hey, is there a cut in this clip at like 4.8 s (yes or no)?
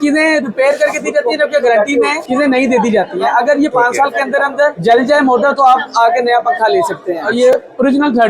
yes